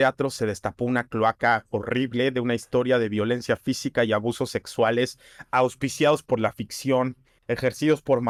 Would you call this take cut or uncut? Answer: uncut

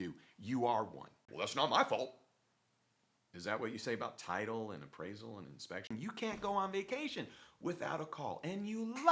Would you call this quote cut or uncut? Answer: cut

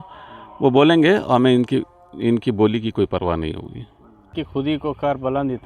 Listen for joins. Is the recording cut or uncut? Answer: cut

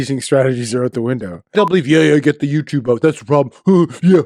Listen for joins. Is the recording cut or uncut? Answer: cut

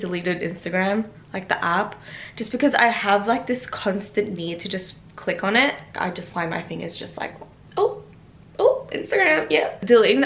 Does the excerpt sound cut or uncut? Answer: uncut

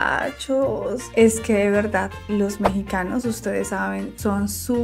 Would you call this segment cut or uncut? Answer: uncut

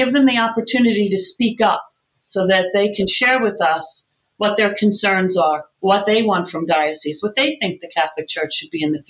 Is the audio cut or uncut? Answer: uncut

